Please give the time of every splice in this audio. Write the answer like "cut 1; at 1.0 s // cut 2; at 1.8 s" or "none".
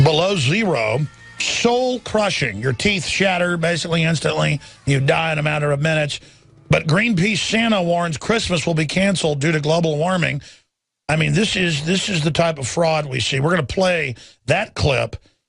cut 1; at 13.7 s